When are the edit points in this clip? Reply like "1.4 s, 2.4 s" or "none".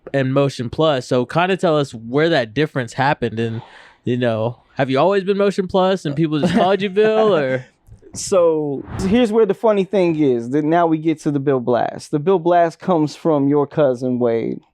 9.0 s